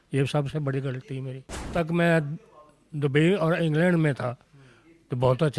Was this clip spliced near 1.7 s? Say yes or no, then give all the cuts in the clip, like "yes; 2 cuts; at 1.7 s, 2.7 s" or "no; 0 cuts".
yes; 1 cut; at 1.7 s